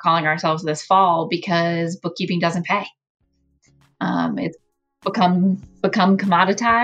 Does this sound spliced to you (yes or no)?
no